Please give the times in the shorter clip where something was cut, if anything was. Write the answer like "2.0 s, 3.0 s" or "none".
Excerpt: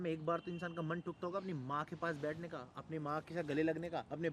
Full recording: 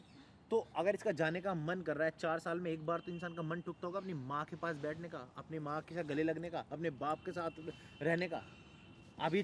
none